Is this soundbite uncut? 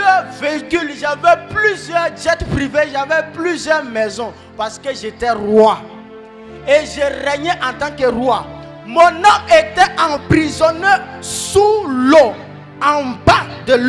yes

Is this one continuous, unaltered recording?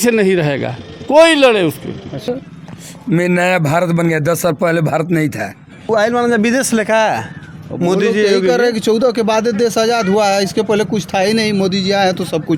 no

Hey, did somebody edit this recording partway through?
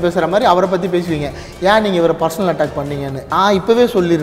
yes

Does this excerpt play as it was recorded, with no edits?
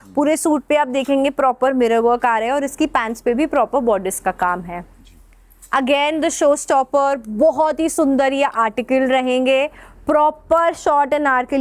yes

